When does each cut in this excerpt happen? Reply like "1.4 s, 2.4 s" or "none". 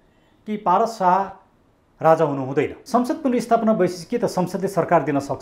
2.8 s